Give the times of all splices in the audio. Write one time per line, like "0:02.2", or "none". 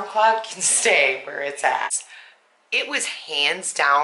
0:02.1